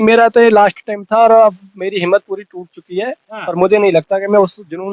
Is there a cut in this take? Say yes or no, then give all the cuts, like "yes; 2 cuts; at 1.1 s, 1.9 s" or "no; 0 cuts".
no; 0 cuts